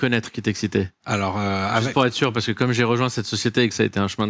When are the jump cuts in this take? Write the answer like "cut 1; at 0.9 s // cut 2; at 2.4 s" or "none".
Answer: cut 1; at 1.0 s